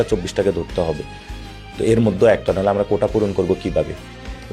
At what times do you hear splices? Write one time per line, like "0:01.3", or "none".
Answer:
none